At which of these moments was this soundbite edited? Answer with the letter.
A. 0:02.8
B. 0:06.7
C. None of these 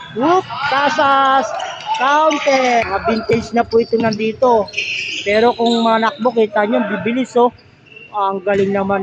A